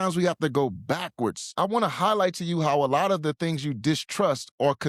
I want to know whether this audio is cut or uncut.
cut